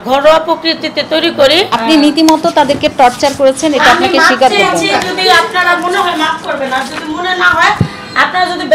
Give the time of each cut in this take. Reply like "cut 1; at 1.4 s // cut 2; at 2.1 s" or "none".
cut 1; at 1.7 s

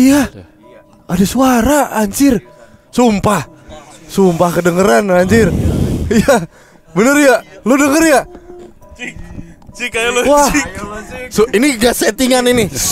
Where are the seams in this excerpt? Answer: none

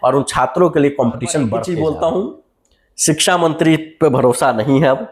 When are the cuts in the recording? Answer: cut 1; at 1.6 s

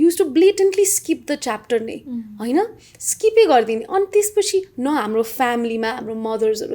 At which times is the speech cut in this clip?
none

